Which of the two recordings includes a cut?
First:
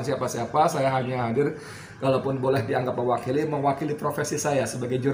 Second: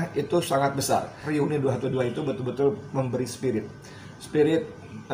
second; 1 cut; at 1.2 s

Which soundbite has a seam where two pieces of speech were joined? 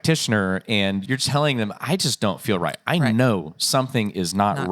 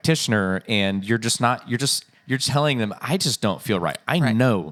first; 1 cut; at 1.0 s

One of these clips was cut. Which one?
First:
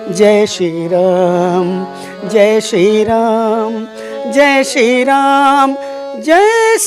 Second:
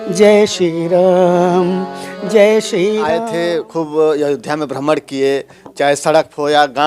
second; 1 cut; at 3.2 s

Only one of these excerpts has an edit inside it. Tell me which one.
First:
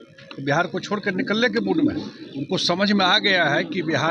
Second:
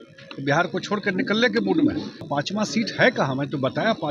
second; 1 cut; at 2.2 s

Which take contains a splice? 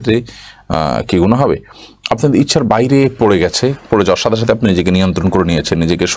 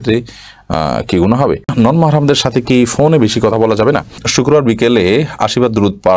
second; 2 cuts; at 1.7 s, 4.2 s

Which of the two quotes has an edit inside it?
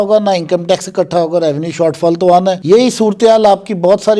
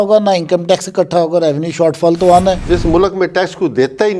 second; 1 cut; at 2.6 s

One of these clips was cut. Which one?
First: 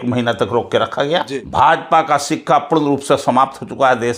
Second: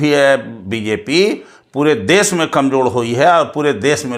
first; 1 cut; at 1.4 s

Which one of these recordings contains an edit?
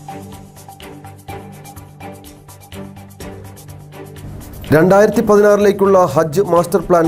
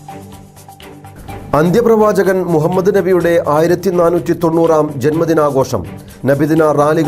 second; 1 cut; at 1.1 s

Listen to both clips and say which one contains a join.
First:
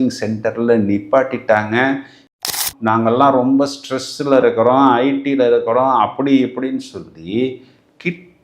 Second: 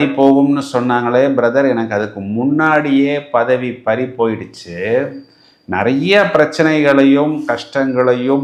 first; 1 cut; at 2.5 s

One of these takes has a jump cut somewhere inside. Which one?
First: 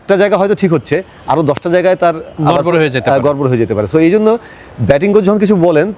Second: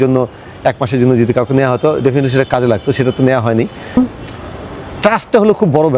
second; 1 cut; at 3.9 s

